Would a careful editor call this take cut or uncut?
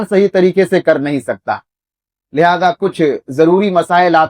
uncut